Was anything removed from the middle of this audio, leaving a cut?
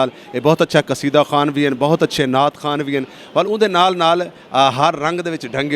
no; 0 cuts

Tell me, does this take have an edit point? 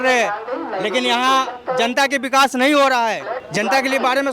yes; 1 cut; at 3.3 s

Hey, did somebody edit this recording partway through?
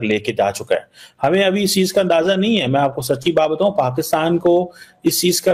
no; 0 cuts

